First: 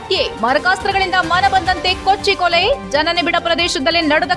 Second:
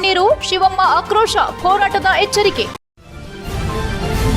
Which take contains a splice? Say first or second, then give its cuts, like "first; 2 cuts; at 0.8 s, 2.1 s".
second; 1 cut; at 2.8 s